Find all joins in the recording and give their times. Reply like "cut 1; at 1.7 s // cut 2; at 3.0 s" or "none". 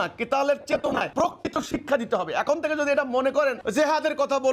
cut 1; at 1.1 s // cut 2; at 3.6 s